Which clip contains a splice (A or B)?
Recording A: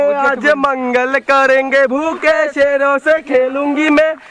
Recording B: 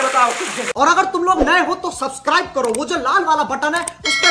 B